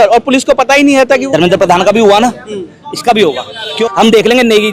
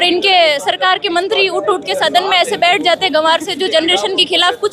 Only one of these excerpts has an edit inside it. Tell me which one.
first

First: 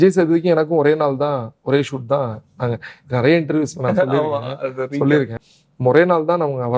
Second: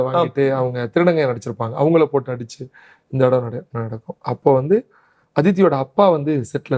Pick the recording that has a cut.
first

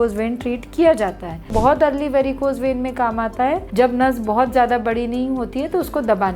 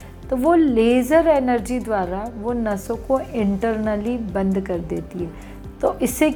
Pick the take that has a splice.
first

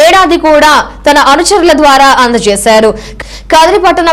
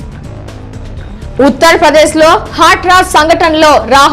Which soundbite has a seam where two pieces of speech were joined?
second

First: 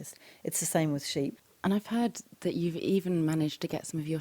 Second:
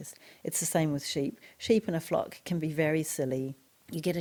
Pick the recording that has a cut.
first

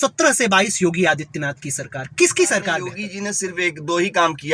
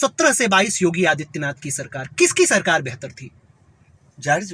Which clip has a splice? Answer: first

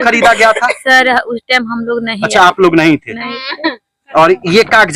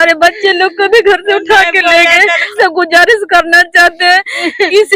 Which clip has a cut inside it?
second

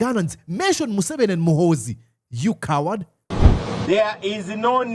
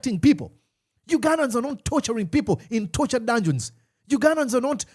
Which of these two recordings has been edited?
first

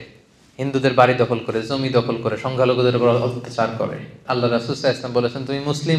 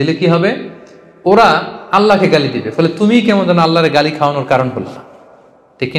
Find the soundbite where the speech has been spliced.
first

